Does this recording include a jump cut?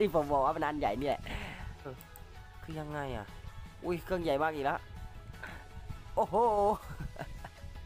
yes; 1 cut; at 2.0 s

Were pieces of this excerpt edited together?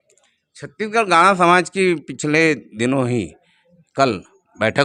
no; 0 cuts

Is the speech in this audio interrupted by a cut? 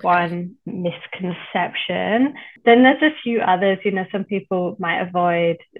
yes; 1 cut; at 2.5 s

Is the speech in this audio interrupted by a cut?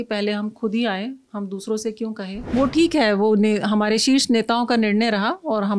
yes; 1 cut; at 2.5 s

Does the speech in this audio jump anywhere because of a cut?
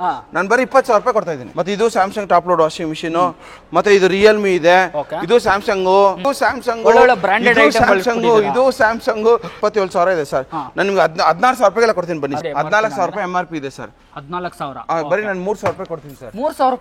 yes; 4 cuts; at 1.4 s, 6.3 s, 9.5 s, 12.4 s

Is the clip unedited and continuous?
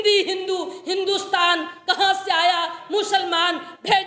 yes; 0 cuts

